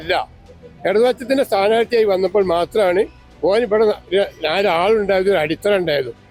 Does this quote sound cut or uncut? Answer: uncut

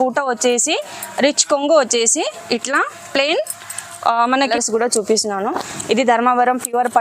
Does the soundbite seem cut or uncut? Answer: cut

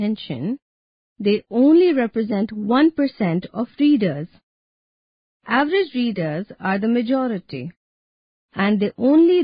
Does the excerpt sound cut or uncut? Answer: uncut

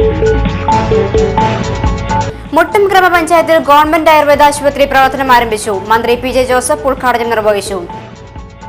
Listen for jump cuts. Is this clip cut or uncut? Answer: uncut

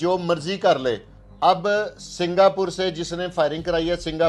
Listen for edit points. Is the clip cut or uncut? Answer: uncut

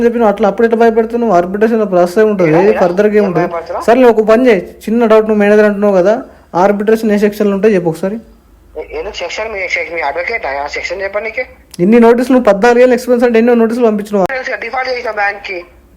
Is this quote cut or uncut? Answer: cut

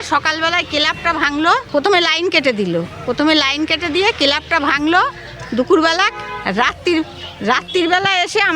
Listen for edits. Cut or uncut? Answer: cut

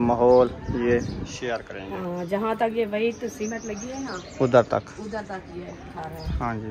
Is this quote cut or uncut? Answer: uncut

